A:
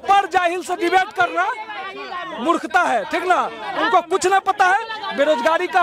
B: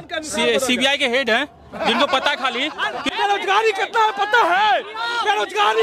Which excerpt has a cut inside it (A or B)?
B